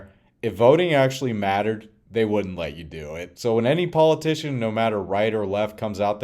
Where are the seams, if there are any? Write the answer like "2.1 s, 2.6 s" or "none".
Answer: 3.3 s